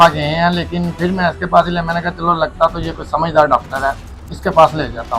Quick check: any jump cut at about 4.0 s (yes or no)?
no